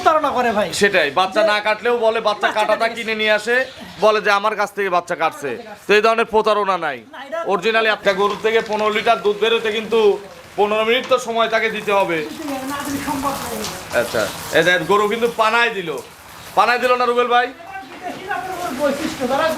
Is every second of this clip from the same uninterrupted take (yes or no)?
no